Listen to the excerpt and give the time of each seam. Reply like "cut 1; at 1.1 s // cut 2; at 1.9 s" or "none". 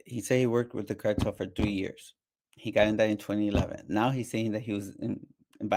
none